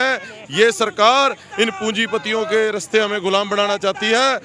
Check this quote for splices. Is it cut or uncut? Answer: uncut